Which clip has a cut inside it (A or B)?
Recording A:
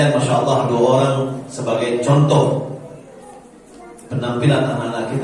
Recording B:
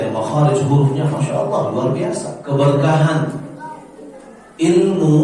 B